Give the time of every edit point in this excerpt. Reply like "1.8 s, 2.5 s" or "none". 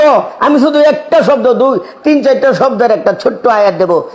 1.9 s